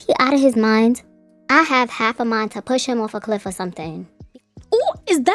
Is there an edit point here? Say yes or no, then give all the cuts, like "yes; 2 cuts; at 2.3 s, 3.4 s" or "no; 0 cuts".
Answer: yes; 1 cut; at 4.1 s